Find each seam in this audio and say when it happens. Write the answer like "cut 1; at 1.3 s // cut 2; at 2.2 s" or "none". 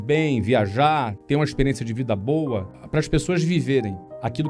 cut 1; at 2.8 s